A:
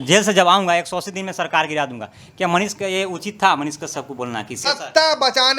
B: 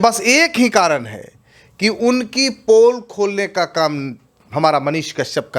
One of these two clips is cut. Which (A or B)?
A